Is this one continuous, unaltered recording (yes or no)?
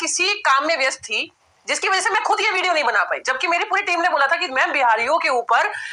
yes